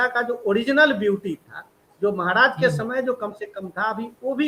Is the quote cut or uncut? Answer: uncut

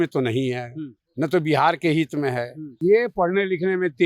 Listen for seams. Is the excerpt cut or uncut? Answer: cut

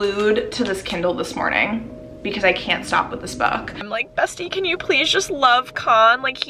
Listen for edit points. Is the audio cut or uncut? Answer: cut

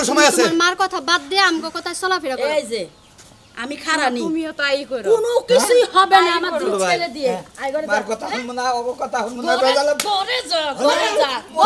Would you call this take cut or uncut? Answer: uncut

